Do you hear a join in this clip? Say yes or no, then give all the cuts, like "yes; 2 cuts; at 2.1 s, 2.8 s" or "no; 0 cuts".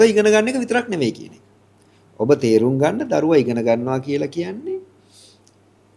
no; 0 cuts